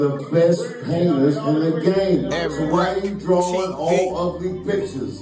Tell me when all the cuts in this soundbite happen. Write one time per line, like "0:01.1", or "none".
none